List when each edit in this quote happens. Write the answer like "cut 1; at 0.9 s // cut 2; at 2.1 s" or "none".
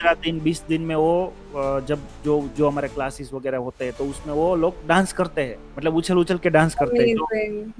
cut 1; at 5.6 s